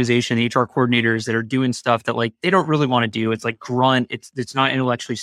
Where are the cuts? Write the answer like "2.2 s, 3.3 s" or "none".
none